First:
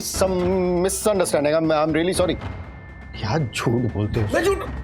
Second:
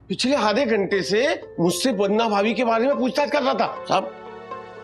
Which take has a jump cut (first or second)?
second